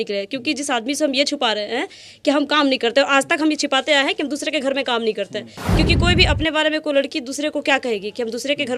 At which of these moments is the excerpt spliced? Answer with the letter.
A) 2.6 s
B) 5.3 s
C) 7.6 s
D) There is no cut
D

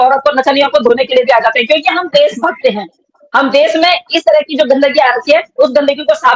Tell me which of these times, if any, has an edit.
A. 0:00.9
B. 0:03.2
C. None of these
C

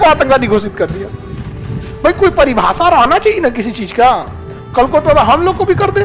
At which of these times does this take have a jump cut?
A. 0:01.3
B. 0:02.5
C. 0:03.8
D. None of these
D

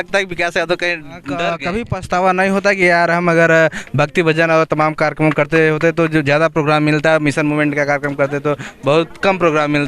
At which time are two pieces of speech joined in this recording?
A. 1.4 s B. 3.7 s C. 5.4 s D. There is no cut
A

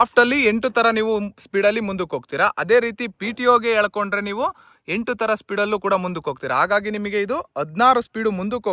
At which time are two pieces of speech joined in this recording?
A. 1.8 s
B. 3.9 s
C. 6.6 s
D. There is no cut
D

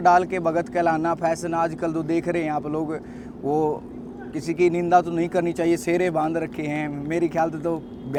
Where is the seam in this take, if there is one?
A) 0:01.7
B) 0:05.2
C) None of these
C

